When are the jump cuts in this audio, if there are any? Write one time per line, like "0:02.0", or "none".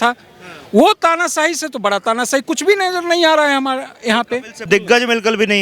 0:04.6